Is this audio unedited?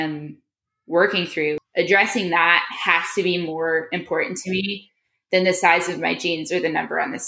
no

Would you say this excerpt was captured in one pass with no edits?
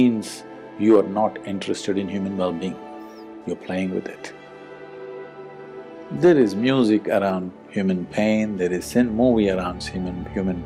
yes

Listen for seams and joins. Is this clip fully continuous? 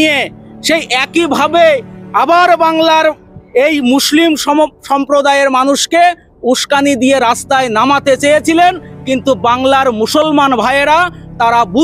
yes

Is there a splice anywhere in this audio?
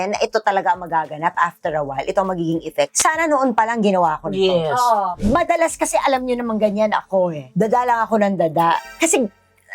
yes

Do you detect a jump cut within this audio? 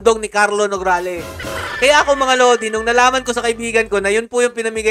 no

